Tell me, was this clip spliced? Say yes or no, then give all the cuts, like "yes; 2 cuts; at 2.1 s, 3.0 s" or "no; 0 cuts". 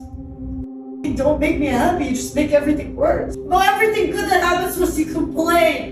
yes; 1 cut; at 3.3 s